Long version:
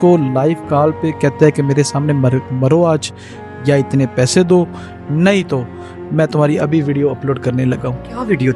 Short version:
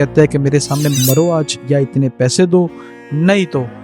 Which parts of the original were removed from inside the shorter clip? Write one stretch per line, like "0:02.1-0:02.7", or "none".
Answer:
0:02.2-0:03.0